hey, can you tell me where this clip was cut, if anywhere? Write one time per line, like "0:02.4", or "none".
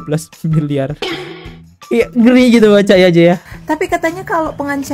0:03.4